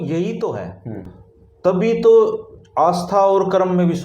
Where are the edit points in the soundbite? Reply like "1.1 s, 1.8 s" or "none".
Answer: none